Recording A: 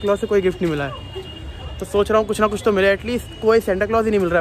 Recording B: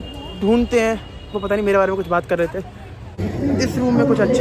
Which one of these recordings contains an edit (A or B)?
B